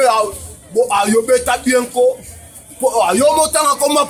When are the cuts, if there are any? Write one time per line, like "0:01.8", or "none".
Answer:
none